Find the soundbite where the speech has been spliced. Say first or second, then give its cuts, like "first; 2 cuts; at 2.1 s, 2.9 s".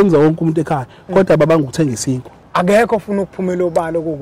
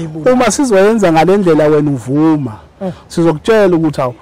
first; 1 cut; at 2.3 s